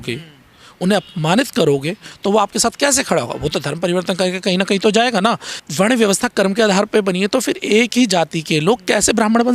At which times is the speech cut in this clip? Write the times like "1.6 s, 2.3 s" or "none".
2.0 s, 5.6 s

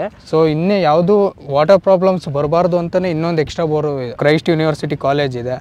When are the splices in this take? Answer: 4.2 s

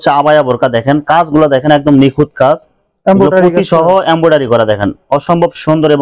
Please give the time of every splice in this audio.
none

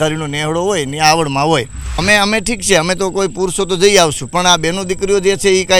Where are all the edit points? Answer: 1.9 s

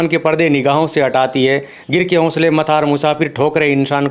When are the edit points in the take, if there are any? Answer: none

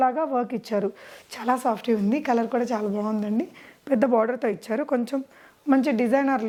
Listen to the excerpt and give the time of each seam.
none

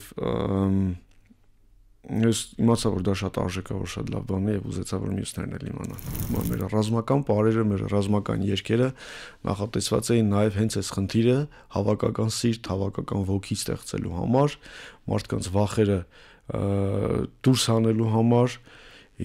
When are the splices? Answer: 6.1 s

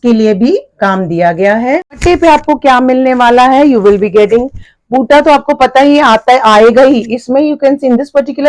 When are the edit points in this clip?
2.0 s

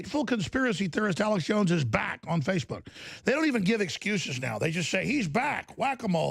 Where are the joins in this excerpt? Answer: none

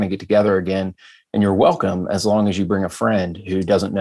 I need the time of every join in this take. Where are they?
none

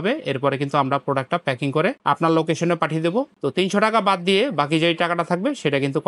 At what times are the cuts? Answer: none

